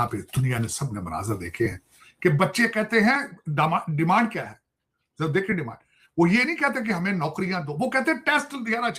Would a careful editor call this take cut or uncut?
uncut